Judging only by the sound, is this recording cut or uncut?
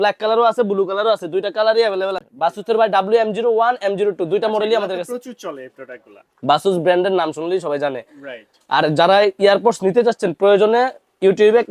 cut